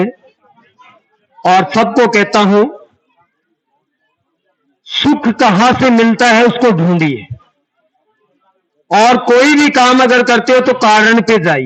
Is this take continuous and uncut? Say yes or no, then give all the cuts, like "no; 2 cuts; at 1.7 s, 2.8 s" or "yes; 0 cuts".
yes; 0 cuts